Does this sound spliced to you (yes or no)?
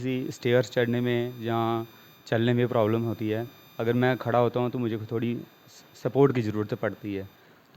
no